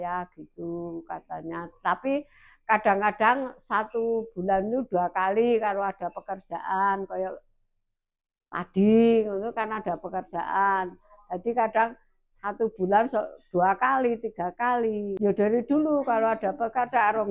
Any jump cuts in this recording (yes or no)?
no